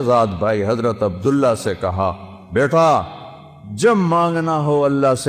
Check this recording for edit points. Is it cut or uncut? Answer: uncut